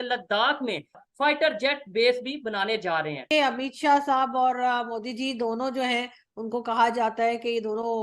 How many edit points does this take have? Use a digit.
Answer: 2